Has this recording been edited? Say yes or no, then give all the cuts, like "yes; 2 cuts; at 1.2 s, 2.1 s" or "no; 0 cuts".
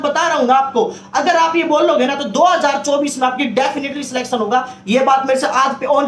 no; 0 cuts